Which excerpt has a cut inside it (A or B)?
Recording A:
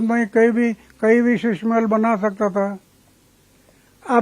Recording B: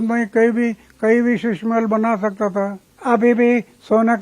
B